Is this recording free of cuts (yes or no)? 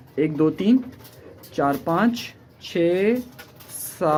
yes